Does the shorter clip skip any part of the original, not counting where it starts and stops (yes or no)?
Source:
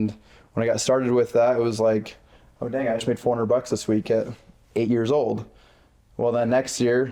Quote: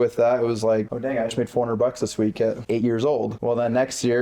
yes